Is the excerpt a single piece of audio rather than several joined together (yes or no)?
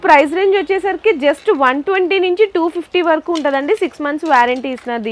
yes